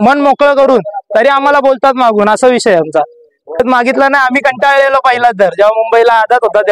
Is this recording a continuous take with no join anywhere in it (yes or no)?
no